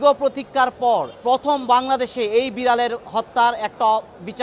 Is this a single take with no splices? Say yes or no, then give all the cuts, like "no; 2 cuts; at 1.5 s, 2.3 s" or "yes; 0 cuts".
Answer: no; 1 cut; at 1.1 s